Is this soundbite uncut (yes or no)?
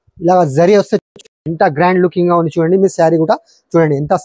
no